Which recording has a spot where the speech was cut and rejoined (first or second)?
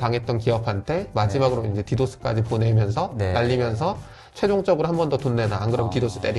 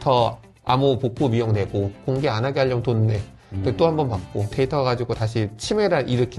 second